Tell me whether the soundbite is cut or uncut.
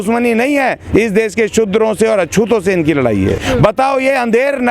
cut